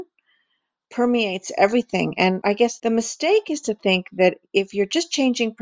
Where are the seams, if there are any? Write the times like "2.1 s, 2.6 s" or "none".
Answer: 2.4 s